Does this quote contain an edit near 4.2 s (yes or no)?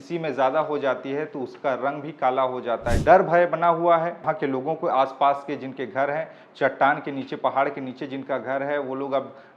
yes